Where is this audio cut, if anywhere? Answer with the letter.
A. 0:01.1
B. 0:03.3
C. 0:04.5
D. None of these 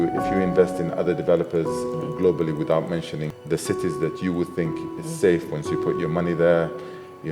B